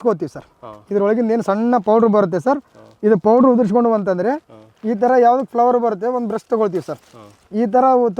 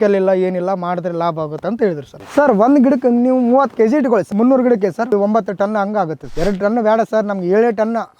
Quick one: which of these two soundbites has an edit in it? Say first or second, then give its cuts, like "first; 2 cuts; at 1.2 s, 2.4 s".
second; 4 cuts; at 2.1 s, 4.3 s, 5.1 s, 6.2 s